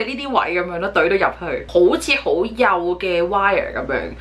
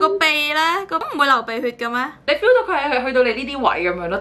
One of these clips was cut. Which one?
second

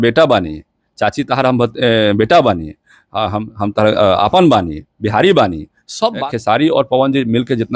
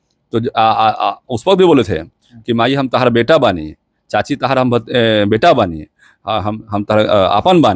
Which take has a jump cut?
first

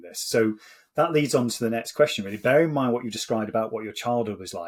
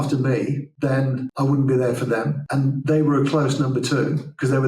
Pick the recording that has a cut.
second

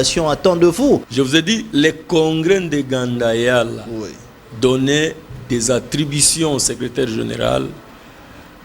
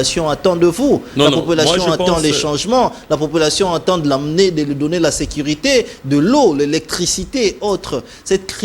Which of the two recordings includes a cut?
first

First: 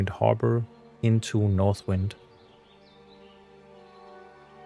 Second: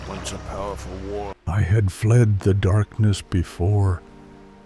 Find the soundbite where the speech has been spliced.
second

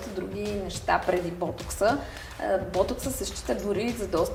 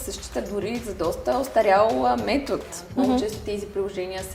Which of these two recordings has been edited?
second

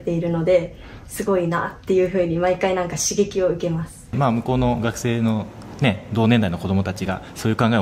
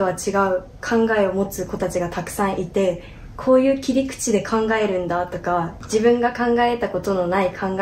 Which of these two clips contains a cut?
first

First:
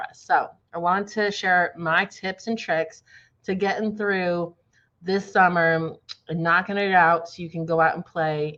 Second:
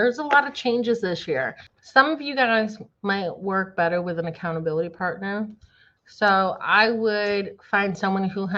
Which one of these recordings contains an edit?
second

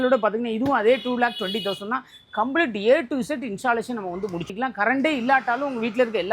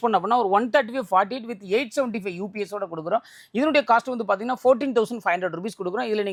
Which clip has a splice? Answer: first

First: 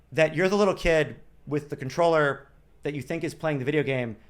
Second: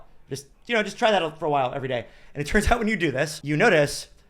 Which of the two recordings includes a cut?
second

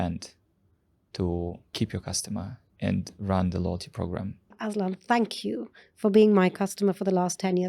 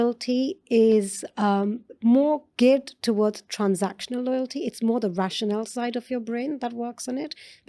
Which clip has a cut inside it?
first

